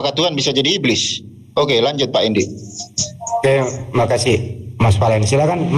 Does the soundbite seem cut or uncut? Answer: uncut